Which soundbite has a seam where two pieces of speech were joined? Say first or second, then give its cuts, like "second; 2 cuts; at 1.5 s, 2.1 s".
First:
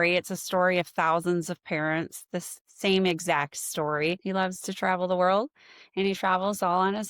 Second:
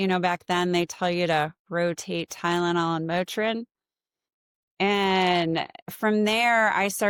first; 1 cut; at 4.2 s